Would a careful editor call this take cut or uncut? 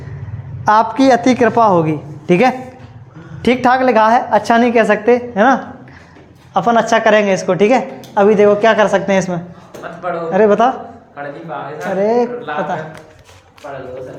uncut